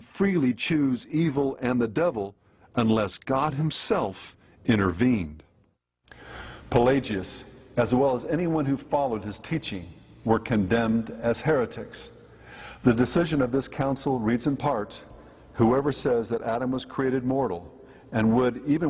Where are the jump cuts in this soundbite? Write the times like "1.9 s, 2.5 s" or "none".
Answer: 14.6 s